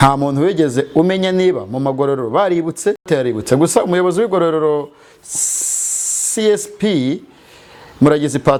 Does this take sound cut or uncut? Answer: uncut